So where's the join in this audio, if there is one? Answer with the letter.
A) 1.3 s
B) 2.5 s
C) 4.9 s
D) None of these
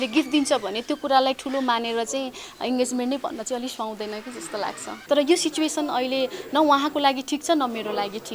C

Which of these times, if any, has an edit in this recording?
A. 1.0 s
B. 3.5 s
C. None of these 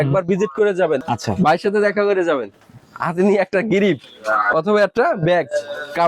A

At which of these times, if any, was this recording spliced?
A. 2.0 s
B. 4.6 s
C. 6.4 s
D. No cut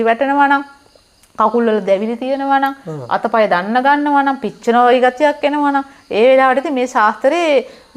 D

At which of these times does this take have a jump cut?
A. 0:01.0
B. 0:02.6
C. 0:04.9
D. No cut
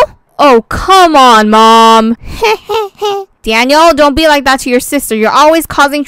D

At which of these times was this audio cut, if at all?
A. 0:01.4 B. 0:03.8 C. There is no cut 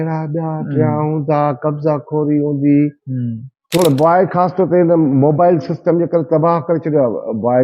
B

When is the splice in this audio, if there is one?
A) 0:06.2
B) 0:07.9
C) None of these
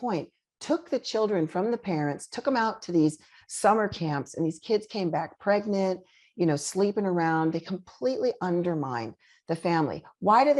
C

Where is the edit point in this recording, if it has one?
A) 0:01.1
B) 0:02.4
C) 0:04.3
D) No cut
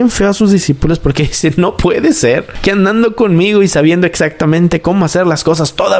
D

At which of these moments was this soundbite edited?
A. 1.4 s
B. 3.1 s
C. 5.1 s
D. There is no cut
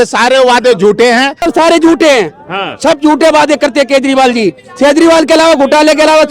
A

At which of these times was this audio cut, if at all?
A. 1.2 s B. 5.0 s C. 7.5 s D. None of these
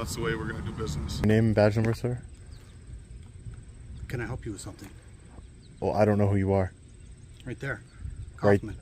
A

